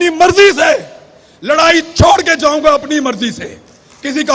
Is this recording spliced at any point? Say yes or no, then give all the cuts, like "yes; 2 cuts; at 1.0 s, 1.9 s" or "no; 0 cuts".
no; 0 cuts